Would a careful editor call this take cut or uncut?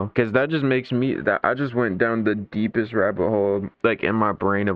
cut